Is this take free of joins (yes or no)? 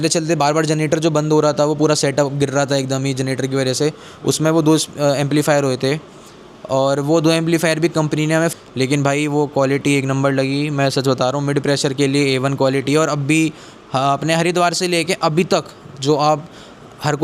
no